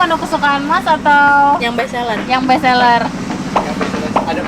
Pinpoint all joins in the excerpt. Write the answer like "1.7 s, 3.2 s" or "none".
none